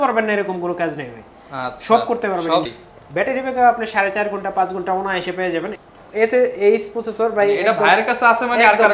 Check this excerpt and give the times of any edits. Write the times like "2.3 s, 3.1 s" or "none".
2.7 s, 5.8 s